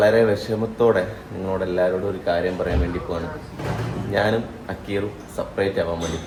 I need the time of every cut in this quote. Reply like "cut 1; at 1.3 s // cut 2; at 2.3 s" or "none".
none